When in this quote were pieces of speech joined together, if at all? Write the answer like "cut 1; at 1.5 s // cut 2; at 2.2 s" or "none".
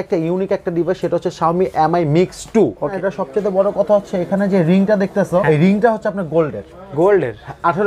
cut 1; at 2.9 s // cut 2; at 5.4 s